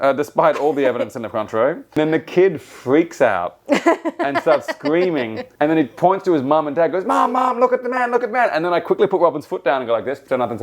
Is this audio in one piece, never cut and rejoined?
no; 2 cuts; at 2.0 s, 5.4 s

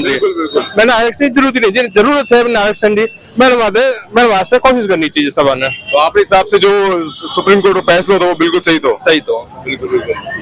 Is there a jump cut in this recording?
no; 0 cuts

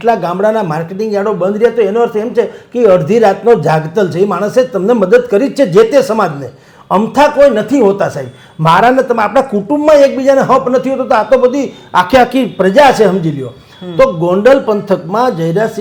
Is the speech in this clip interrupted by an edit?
no; 0 cuts

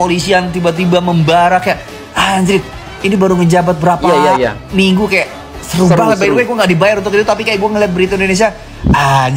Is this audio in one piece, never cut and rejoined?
yes; 0 cuts

